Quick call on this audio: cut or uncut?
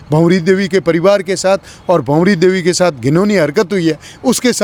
uncut